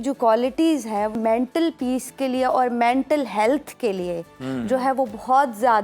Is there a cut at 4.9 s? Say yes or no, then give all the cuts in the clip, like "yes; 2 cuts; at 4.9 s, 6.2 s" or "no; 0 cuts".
no; 1 cut; at 1.1 s